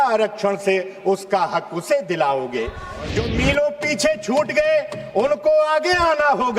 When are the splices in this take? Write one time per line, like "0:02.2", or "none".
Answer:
0:02.9